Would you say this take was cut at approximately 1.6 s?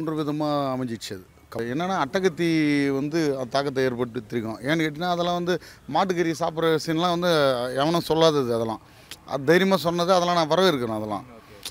yes; 1 cut; at 1.6 s

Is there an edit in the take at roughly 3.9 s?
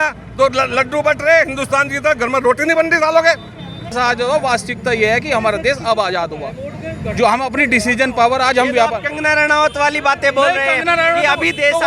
yes; 1 cut; at 3.9 s

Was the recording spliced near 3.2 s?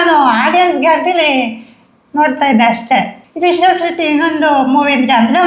yes; 1 cut; at 3.2 s

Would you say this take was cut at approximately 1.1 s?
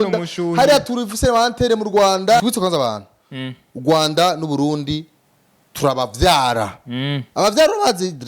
no; 1 cut; at 2.4 s

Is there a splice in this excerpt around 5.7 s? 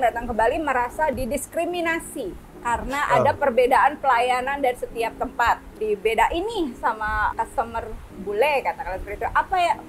yes; 3 cuts; at 2.5 s, 5.7 s, 7.3 s

